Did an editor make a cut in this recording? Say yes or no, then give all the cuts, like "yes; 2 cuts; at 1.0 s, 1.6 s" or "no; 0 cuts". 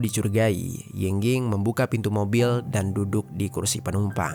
no; 0 cuts